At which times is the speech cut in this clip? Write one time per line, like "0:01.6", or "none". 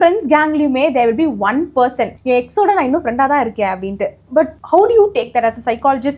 0:02.1
0:04.6